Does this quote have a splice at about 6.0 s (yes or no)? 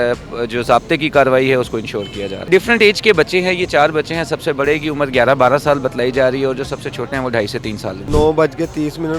no